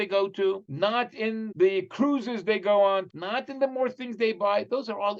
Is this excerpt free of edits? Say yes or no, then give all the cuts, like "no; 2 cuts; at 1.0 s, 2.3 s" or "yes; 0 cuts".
no; 2 cuts; at 1.2 s, 3.1 s